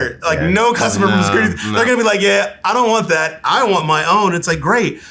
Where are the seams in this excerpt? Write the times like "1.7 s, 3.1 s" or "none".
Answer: none